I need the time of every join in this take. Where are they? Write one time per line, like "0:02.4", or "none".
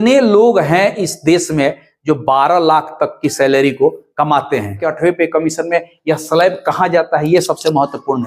0:04.9